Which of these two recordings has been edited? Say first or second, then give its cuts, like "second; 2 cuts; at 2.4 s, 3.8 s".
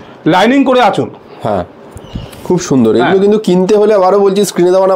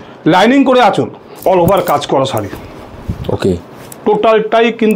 second; 1 cut; at 1.3 s